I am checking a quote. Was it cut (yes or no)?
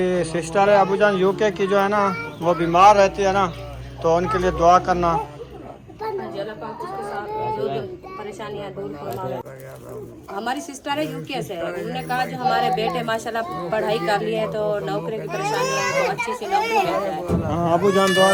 no